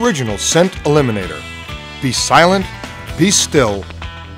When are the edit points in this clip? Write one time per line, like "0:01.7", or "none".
none